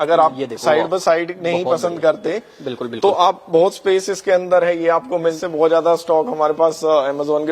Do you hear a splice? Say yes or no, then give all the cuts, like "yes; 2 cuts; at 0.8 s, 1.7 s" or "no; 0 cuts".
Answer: yes; 1 cut; at 5.3 s